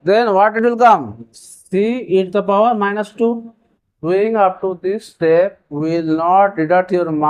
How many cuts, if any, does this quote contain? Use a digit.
1